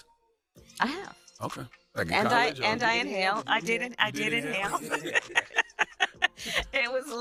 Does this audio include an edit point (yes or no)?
no